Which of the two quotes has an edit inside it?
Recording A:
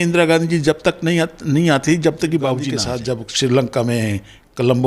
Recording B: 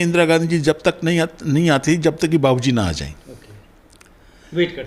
A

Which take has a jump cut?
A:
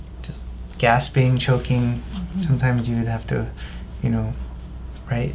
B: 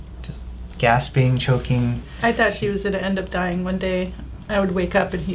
B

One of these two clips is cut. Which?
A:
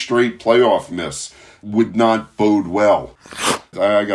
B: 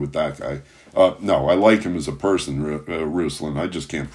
A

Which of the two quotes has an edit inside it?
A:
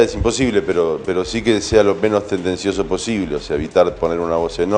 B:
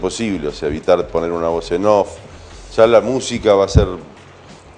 A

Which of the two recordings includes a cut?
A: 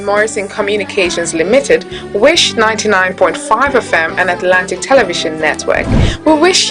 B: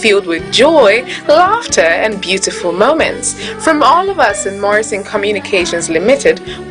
B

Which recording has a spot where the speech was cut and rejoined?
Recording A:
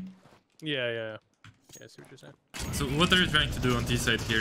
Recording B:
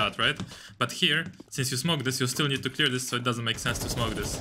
A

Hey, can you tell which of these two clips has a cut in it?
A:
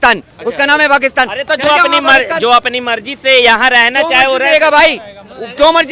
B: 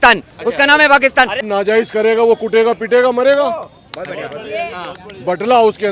B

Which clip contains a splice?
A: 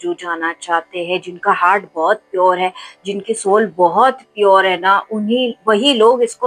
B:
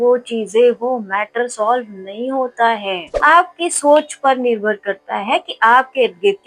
B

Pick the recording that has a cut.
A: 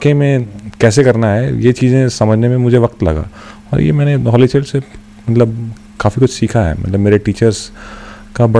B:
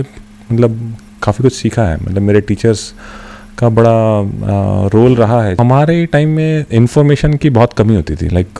B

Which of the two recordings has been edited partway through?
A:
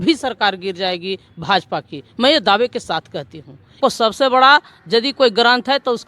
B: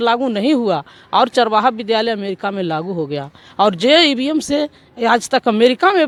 A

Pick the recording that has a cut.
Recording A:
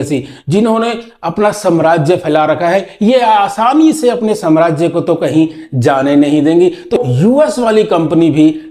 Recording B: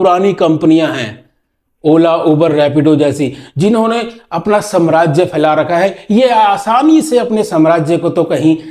A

